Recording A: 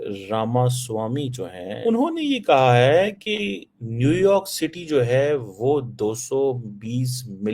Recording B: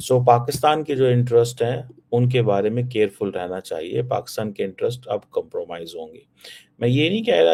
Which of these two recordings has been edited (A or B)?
A